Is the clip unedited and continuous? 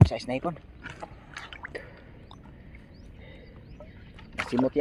yes; 0 cuts

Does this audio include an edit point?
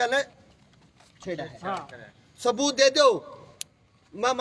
no; 0 cuts

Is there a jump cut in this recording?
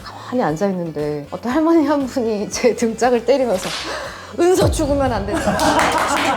yes; 1 cut; at 1.3 s

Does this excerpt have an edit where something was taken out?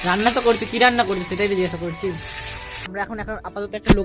yes; 1 cut; at 2.8 s

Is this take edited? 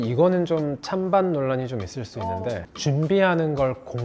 yes; 1 cut; at 2.7 s

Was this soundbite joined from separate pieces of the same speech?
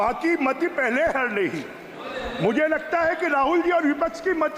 no; 0 cuts

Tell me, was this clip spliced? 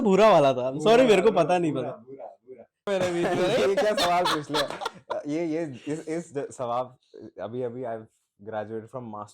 yes; 1 cut; at 2.9 s

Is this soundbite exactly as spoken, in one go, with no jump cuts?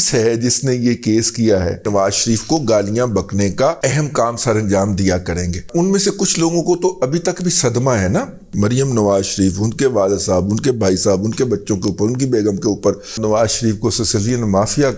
no; 5 cuts; at 1.9 s, 3.8 s, 5.6 s, 8.5 s, 13.2 s

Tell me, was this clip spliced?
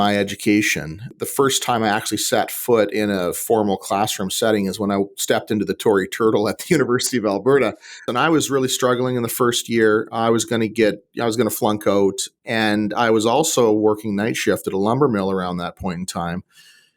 yes; 2 cuts; at 1.0 s, 8.0 s

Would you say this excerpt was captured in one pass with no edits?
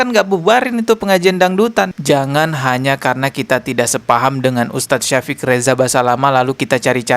no; 1 cut; at 1.9 s

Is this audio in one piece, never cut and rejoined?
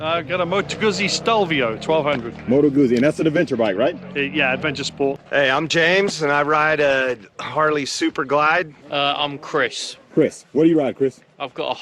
no; 2 cuts; at 5.2 s, 8.8 s

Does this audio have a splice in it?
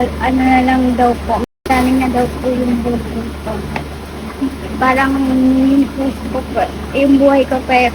no; 0 cuts

